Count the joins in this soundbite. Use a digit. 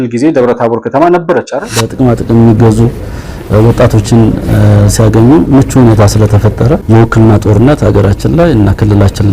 1